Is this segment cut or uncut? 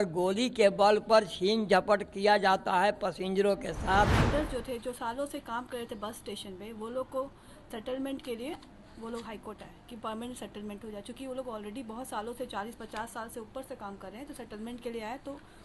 cut